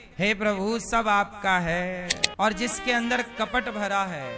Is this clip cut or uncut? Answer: cut